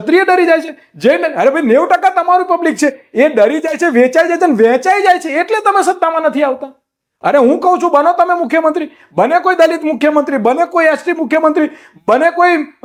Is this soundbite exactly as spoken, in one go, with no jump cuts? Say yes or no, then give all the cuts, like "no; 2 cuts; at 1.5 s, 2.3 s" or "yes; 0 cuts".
yes; 0 cuts